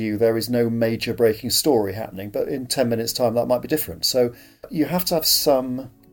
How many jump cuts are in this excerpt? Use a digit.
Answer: 1